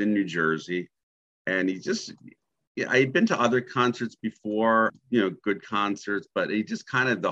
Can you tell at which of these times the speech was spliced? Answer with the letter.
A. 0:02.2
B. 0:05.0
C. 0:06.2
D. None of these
B